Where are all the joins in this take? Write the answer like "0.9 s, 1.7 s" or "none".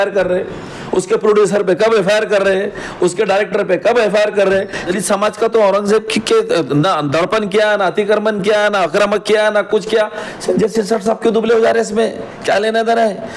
4.9 s

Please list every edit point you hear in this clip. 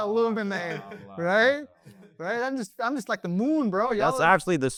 none

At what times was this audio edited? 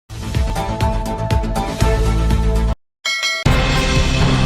3.4 s

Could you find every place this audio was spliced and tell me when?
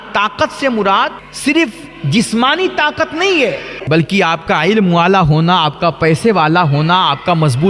1.3 s, 3.8 s

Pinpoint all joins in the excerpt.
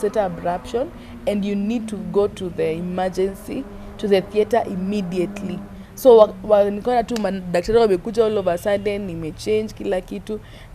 none

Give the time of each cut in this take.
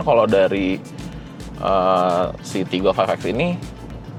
none

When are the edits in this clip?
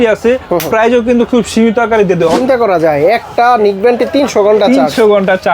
2.4 s

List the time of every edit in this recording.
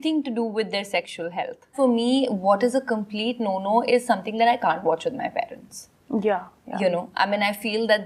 1.7 s

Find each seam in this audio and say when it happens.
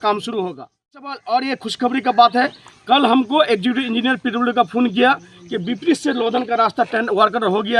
1.2 s

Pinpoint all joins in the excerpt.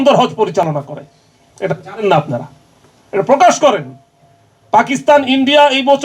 none

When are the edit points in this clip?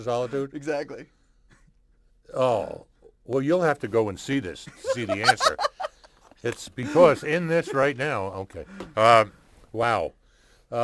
9.9 s

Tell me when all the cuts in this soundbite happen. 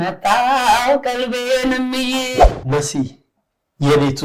2.4 s

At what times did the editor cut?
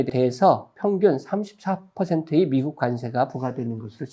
none

